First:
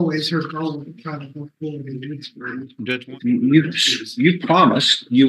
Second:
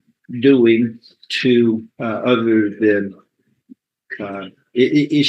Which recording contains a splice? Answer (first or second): first